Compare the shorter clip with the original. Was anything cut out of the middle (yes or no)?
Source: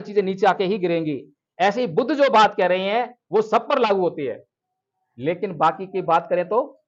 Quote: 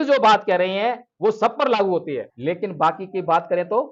yes